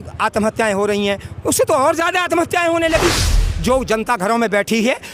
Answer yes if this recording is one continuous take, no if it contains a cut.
no